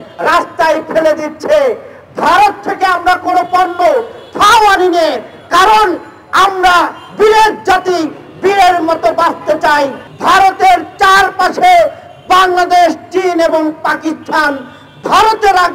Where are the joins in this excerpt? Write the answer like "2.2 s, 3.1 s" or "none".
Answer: 10.0 s